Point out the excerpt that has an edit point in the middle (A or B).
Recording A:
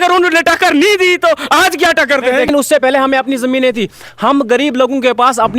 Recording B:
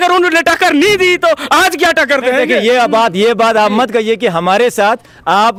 A